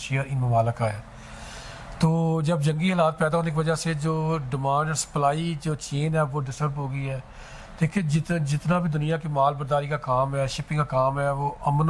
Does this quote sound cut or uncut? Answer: uncut